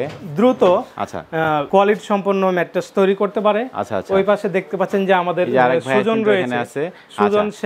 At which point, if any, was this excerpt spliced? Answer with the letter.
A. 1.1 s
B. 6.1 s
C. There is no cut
C